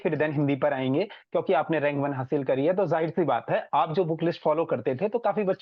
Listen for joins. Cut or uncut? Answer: uncut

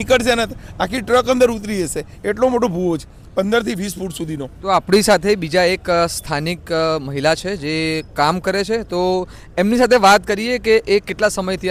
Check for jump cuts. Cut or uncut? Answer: uncut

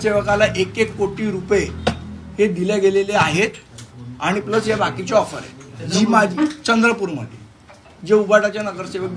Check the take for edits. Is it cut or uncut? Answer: uncut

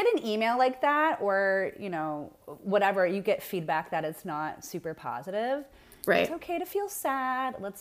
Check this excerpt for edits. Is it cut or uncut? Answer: uncut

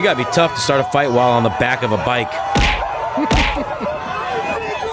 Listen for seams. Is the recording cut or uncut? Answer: uncut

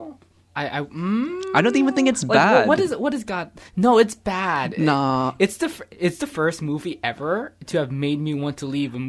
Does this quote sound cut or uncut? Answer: uncut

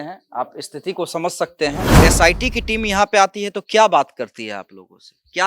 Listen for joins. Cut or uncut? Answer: cut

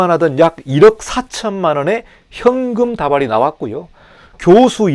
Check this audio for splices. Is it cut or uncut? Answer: uncut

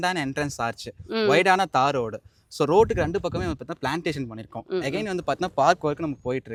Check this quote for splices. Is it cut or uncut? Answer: uncut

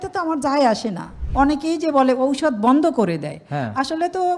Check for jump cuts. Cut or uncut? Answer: cut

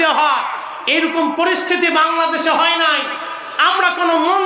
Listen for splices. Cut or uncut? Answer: uncut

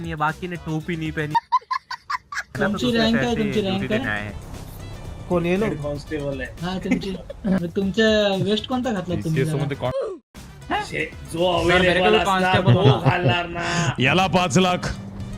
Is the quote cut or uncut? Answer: cut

